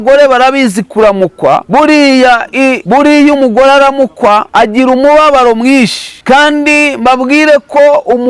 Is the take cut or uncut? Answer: uncut